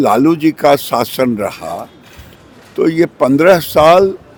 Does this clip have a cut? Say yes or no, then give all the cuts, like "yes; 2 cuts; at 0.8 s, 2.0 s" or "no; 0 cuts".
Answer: no; 0 cuts